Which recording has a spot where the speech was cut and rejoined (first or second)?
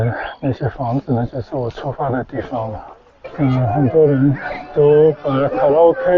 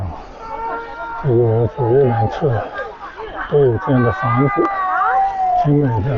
first